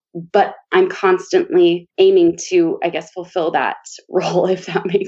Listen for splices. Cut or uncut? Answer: uncut